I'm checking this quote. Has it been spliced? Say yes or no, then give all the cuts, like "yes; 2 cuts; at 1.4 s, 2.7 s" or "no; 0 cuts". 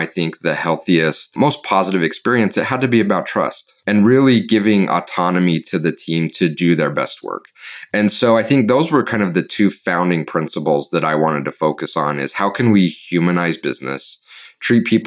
yes; 2 cuts; at 1.2 s, 3.7 s